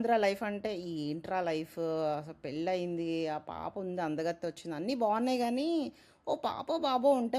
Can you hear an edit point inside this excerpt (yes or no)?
no